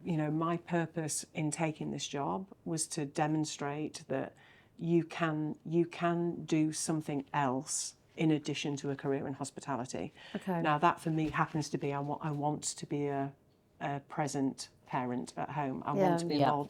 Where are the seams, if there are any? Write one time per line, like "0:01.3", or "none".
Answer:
none